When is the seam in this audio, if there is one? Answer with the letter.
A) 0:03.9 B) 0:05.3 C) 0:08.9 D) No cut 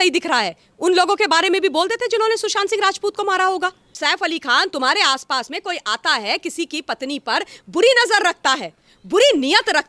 A